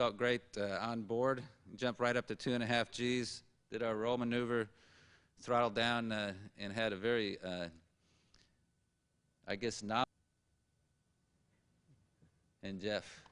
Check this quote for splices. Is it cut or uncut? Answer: uncut